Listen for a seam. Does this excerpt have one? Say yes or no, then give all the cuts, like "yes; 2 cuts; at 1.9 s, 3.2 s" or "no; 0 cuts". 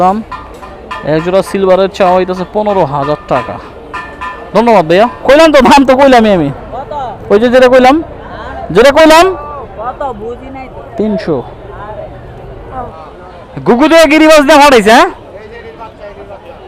yes; 2 cuts; at 5.2 s, 12.7 s